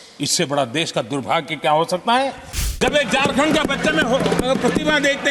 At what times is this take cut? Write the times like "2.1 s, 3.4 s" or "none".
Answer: 2.8 s